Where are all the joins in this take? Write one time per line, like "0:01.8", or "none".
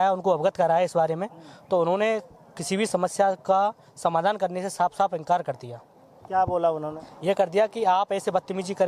none